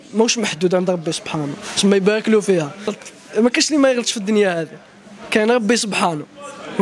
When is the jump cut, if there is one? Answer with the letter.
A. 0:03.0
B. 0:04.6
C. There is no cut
A